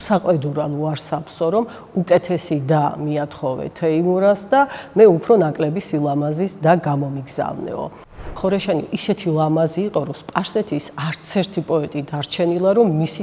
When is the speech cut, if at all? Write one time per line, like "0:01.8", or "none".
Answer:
0:08.3